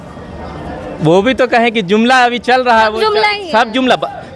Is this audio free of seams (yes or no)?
yes